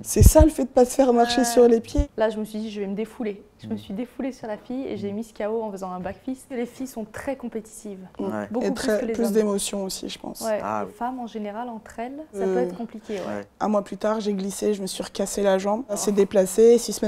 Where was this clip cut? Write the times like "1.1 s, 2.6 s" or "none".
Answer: 1.9 s, 6.6 s, 10.9 s, 12.4 s, 13.4 s, 16.0 s